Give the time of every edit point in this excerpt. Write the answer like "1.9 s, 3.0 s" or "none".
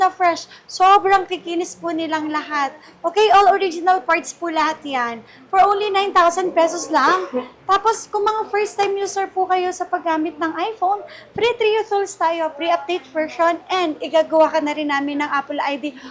none